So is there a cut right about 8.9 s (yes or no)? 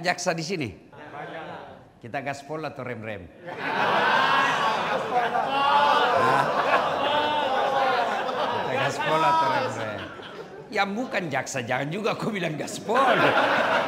no